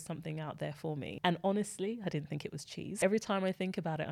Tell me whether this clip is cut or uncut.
cut